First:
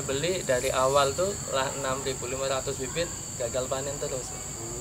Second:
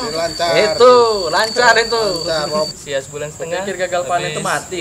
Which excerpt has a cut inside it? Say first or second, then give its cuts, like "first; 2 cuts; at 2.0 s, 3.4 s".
second; 1 cut; at 2.7 s